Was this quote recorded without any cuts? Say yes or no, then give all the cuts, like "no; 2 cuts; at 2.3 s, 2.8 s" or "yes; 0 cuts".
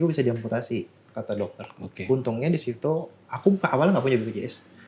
yes; 0 cuts